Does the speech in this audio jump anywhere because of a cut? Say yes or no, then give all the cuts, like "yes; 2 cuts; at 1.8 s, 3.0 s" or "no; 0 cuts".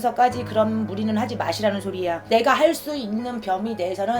yes; 1 cut; at 2.2 s